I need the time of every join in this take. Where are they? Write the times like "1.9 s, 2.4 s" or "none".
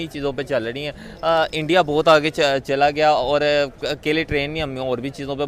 none